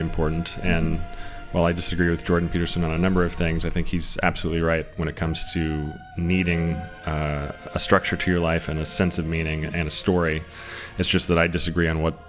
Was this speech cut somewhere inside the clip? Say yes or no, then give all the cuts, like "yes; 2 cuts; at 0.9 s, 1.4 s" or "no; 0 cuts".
no; 0 cuts